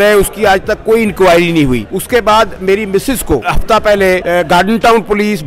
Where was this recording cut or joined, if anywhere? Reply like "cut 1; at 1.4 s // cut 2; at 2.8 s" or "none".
cut 1; at 1.9 s // cut 2; at 3.5 s // cut 3; at 4.2 s